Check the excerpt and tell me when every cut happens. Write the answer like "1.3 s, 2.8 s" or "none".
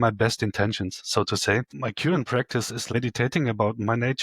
1.7 s, 2.9 s